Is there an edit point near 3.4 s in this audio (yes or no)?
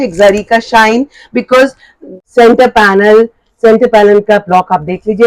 no